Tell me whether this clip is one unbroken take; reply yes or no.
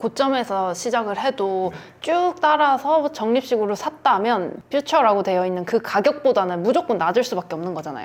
yes